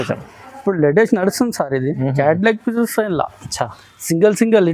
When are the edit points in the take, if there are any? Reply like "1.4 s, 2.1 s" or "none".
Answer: none